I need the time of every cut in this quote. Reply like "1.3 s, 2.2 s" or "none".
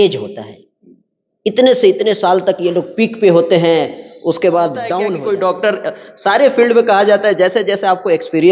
5.1 s